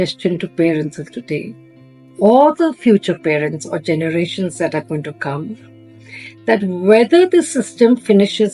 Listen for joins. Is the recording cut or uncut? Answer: uncut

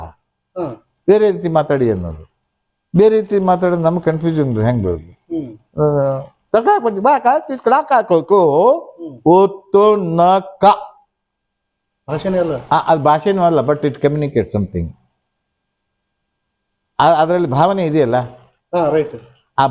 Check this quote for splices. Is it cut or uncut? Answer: uncut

